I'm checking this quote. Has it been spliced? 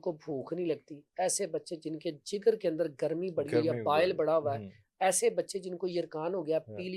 no; 0 cuts

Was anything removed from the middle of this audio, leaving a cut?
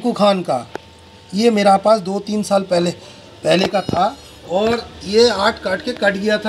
no; 0 cuts

